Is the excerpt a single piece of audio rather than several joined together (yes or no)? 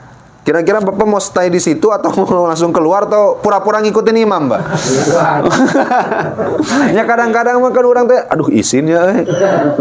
yes